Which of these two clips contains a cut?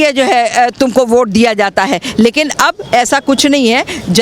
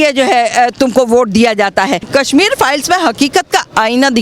second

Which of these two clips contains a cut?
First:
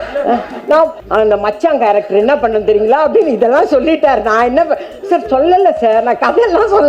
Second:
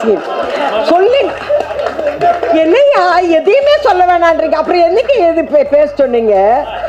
first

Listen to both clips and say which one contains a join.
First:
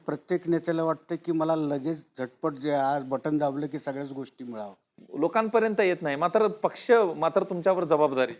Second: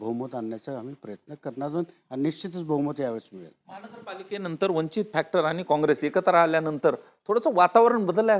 first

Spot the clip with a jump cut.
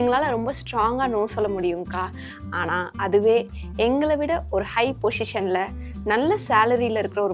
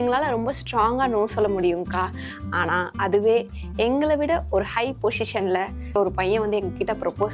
second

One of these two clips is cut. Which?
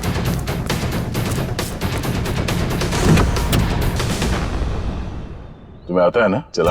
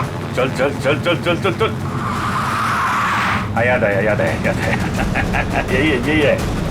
first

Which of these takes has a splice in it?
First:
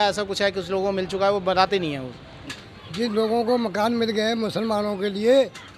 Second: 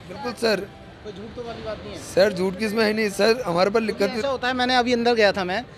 first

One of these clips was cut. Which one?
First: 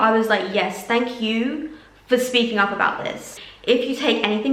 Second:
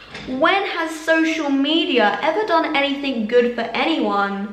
first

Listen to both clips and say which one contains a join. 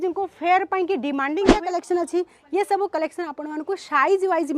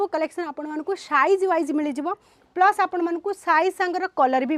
first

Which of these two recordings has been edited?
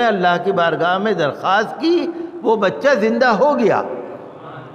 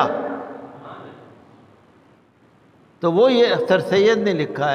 second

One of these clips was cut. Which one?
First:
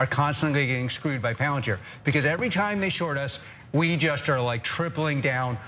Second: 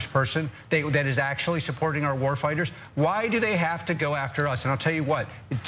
second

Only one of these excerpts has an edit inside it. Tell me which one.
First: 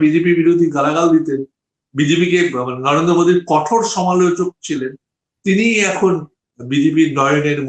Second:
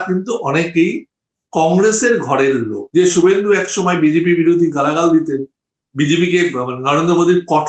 second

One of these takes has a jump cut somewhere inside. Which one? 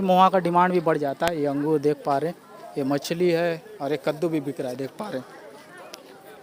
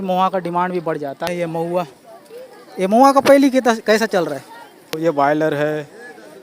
second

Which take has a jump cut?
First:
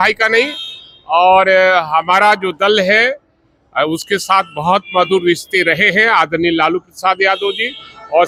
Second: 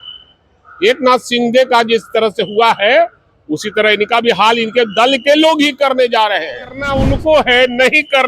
second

